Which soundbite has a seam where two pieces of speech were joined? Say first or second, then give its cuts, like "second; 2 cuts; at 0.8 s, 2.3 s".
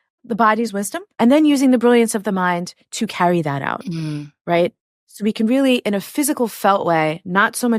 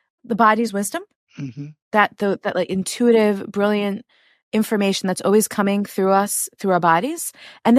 first; 1 cut; at 1.0 s